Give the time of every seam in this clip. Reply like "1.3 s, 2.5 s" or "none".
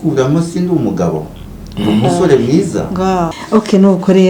3.4 s